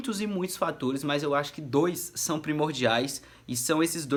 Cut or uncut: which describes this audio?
uncut